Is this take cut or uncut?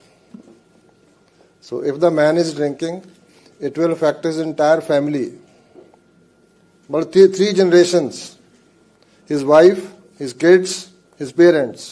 uncut